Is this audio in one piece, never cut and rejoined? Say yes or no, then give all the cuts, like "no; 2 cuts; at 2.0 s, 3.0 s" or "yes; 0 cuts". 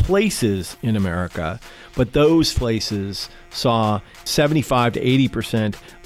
no; 1 cut; at 2.5 s